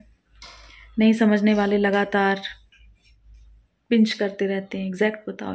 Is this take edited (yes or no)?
no